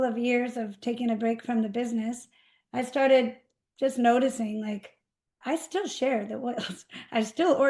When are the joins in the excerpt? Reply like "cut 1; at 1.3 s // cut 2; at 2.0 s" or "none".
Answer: none